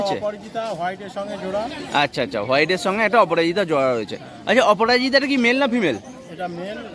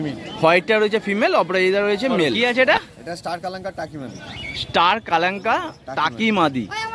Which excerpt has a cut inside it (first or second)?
second